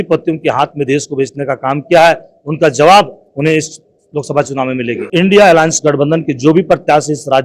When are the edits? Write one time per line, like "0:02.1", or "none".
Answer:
0:05.0